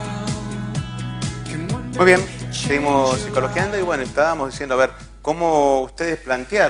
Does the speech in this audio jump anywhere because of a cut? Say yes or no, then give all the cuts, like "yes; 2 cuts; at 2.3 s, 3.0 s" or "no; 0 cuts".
yes; 1 cut; at 5.4 s